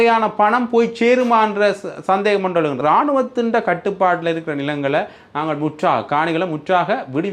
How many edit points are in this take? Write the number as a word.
one